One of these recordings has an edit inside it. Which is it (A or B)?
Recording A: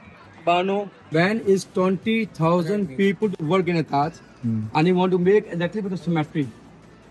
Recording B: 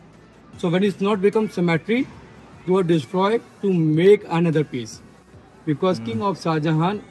A